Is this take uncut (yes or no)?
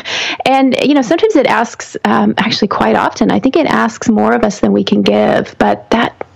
yes